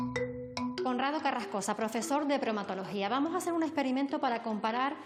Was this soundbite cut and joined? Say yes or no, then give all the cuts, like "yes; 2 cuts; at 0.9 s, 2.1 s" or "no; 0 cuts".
no; 0 cuts